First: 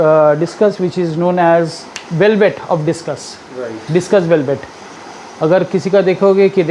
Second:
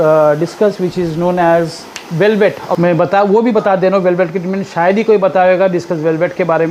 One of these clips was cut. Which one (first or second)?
second